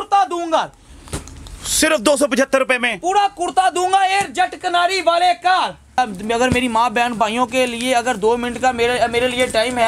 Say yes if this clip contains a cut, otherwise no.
yes